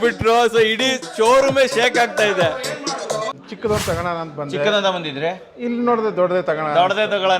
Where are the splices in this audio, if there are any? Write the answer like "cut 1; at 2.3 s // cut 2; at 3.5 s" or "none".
cut 1; at 3.3 s

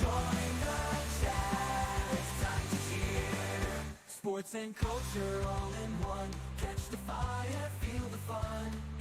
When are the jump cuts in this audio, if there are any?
none

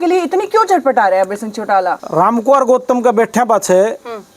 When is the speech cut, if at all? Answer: cut 1; at 2.0 s

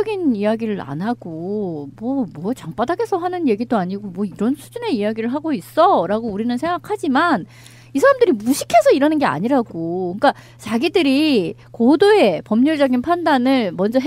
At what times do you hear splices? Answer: cut 1; at 3.0 s

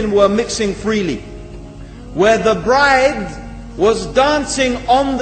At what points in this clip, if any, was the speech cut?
none

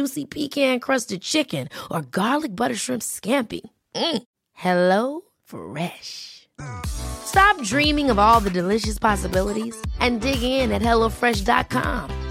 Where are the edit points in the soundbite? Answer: none

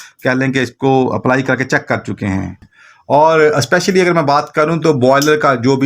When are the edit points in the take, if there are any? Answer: cut 1; at 2.7 s

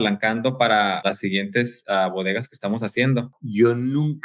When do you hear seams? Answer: cut 1; at 3.3 s

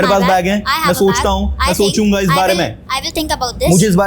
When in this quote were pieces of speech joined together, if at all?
none

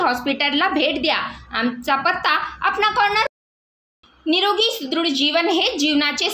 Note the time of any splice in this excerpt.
cut 1; at 3.3 s

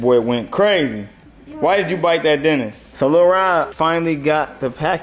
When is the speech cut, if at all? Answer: cut 1; at 2.8 s // cut 2; at 3.7 s

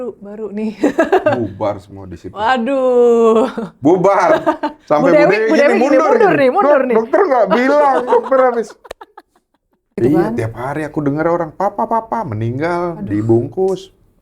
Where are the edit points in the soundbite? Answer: cut 1; at 9.9 s

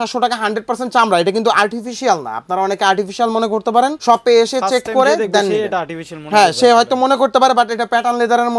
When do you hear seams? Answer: none

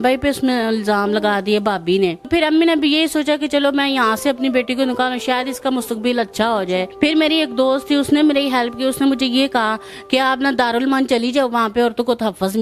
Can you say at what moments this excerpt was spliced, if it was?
cut 1; at 2.3 s // cut 2; at 6.9 s

